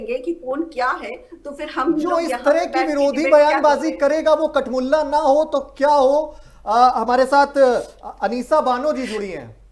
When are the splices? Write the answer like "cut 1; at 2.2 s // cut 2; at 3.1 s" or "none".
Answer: none

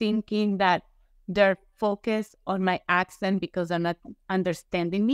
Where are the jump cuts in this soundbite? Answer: none

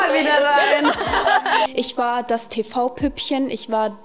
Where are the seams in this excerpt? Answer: cut 1; at 1.7 s

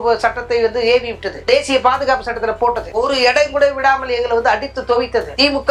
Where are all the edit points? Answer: none

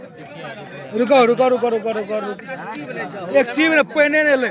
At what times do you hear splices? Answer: cut 1; at 2.3 s

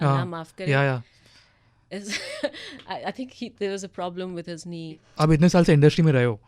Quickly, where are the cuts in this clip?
cut 1; at 5.0 s

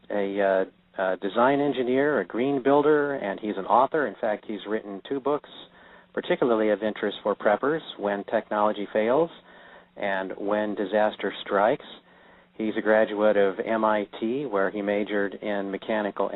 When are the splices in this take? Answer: none

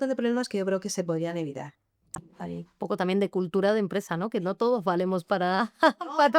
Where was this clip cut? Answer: cut 1; at 2.2 s

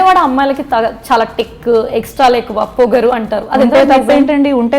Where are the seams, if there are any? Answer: none

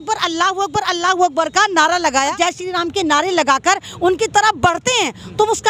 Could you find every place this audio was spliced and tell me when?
cut 1; at 2.3 s

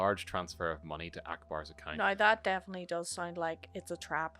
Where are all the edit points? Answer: cut 1; at 1.8 s

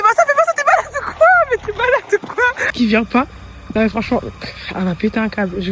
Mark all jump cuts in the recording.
cut 1; at 2.6 s

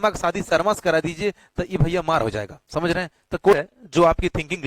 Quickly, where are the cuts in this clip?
cut 1; at 3.5 s

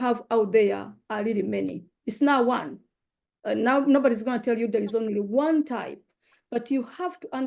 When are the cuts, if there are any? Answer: none

